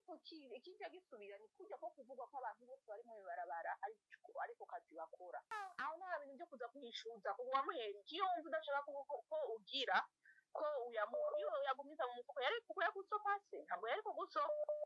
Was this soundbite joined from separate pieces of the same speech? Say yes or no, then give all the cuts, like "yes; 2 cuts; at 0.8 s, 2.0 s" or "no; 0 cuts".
yes; 1 cut; at 5.5 s